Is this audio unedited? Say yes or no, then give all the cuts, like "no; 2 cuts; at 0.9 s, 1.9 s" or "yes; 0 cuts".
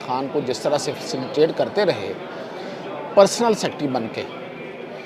yes; 0 cuts